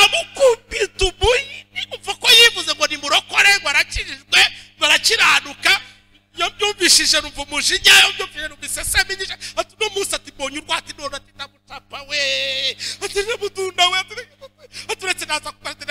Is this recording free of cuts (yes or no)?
yes